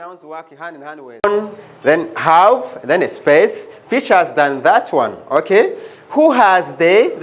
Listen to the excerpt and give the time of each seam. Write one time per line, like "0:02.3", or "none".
0:01.2